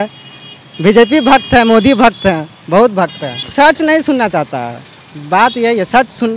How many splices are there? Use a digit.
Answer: 1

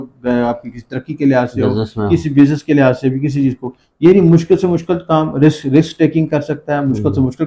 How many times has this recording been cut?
0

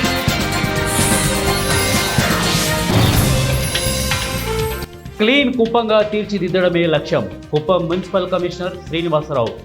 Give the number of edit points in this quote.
1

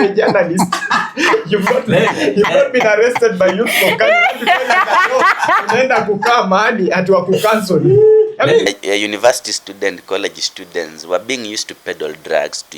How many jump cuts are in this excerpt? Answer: 1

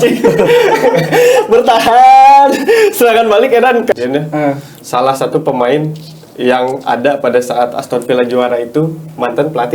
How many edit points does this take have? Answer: 1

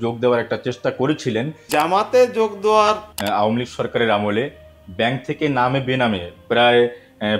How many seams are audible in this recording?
2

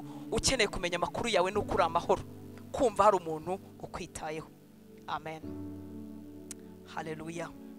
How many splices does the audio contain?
0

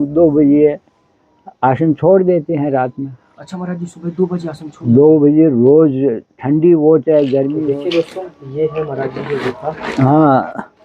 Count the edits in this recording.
1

